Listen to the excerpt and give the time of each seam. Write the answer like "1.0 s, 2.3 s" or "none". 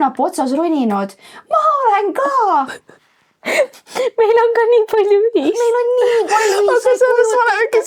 none